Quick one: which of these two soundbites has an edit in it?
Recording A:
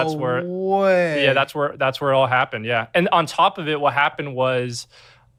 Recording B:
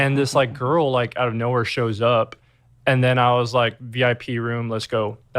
B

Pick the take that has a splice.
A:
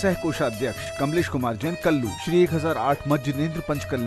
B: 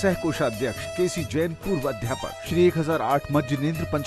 B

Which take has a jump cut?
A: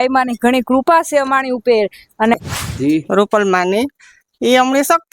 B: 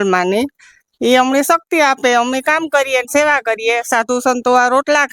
A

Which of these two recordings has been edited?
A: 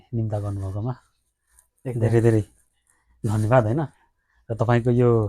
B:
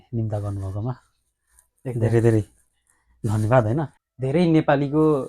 B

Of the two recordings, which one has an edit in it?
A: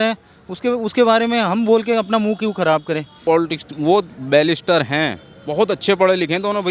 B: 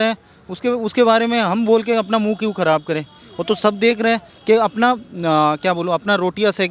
A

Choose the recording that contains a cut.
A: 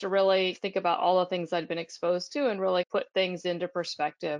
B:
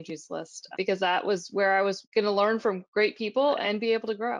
B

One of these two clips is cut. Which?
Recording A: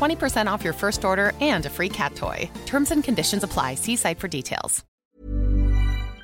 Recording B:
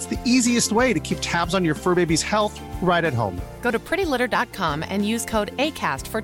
A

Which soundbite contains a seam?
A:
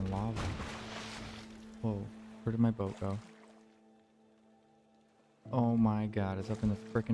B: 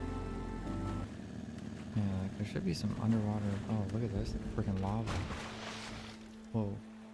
B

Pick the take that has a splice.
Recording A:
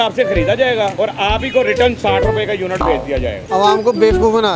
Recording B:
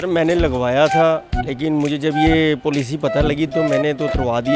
A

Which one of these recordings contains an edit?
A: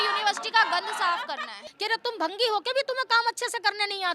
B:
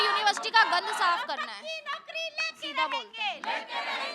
A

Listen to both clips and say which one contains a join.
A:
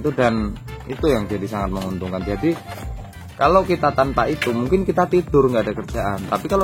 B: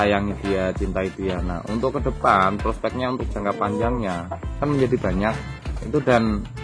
B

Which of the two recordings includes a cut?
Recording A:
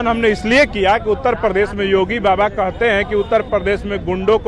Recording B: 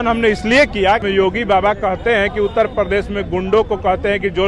B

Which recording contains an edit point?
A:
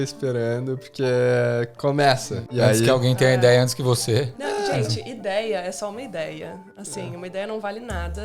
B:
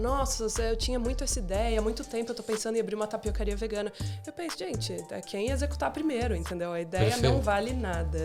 A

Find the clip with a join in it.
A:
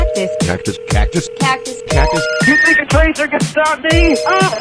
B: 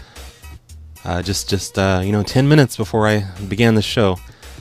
B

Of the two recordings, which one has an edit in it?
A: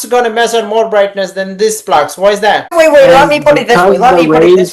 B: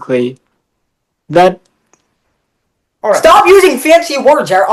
A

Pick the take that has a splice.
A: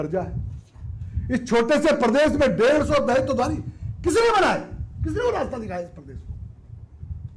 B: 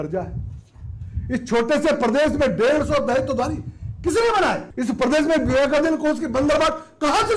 B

